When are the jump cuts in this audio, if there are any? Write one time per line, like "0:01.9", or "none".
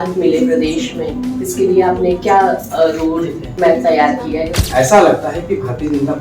0:03.5
0:04.6